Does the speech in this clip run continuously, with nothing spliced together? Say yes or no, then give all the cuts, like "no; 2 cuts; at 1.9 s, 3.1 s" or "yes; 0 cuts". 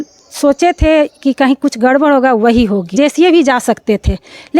no; 1 cut; at 2.9 s